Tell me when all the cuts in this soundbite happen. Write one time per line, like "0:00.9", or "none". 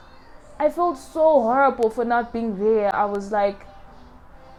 none